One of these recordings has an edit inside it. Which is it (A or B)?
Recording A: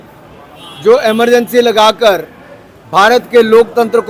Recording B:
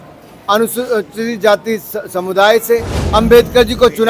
B